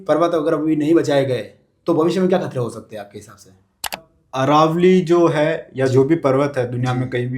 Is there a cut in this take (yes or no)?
yes